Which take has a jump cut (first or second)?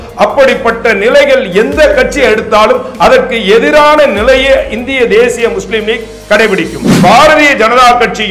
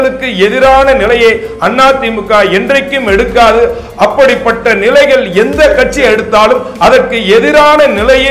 first